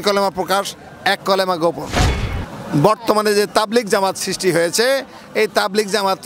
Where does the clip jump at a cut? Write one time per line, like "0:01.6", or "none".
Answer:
0:02.1